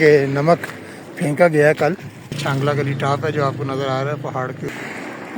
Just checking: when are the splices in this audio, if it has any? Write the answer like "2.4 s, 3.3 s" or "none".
2.4 s, 4.7 s